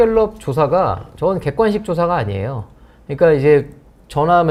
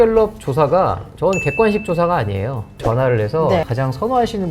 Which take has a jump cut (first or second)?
second